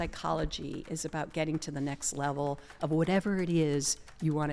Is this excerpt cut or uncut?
uncut